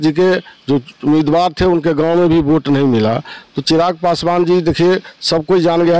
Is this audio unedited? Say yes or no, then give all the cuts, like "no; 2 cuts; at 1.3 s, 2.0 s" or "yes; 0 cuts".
yes; 0 cuts